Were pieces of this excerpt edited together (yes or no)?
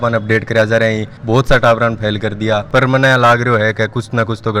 yes